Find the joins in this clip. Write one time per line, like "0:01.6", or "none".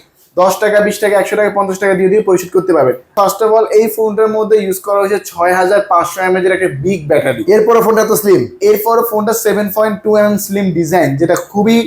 0:03.1